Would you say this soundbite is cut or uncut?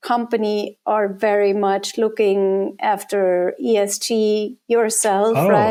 uncut